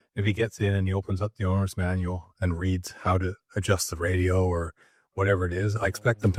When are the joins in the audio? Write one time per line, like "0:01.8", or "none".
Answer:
none